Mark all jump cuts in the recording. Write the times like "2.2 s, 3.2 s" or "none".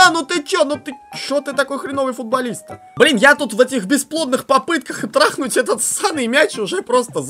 2.8 s